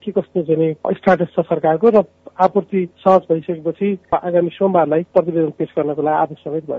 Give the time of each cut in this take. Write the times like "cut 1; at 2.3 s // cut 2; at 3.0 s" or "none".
cut 1; at 2.9 s // cut 2; at 4.0 s // cut 3; at 5.1 s